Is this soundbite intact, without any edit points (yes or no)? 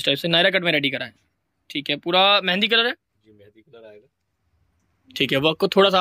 yes